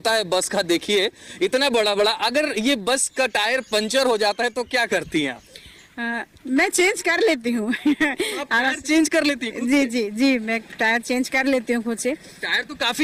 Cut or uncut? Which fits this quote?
uncut